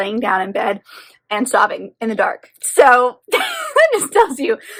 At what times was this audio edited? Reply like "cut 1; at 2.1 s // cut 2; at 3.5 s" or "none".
none